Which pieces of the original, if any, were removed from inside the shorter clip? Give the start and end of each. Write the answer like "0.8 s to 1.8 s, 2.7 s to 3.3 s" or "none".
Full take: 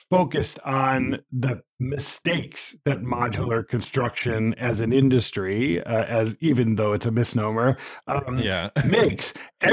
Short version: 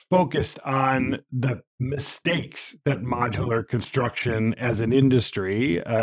none